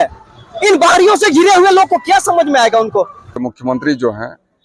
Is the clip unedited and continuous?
no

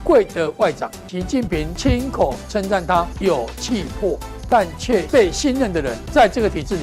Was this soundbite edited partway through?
yes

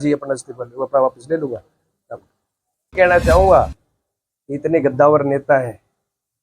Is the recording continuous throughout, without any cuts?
no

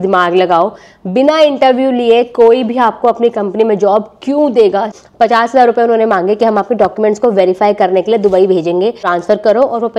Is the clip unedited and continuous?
no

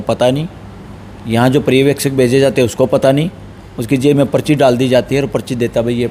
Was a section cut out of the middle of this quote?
no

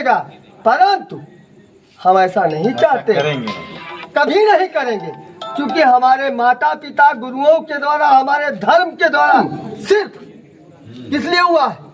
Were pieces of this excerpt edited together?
yes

